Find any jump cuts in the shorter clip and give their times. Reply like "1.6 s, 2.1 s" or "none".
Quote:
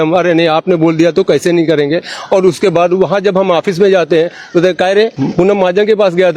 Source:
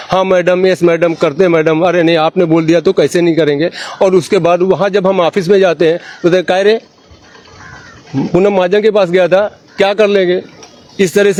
5.1 s